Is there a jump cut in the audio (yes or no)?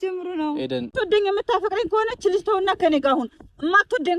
yes